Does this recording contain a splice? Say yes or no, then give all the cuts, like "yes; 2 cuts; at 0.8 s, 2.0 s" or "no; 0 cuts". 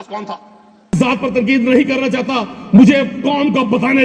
yes; 1 cut; at 1.0 s